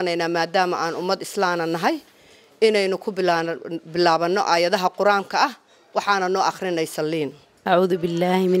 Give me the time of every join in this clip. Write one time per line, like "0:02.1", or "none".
0:07.5